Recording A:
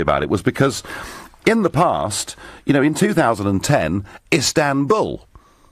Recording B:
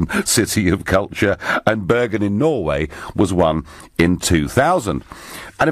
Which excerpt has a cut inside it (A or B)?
A